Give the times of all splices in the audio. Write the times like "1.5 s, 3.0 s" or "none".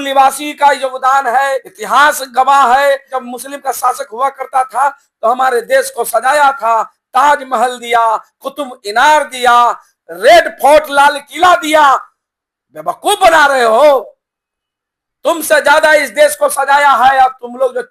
none